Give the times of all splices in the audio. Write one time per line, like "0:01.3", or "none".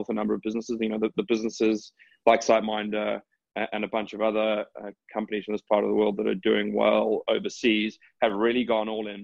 none